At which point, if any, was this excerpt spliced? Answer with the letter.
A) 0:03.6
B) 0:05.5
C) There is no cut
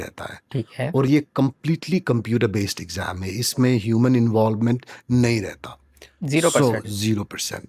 C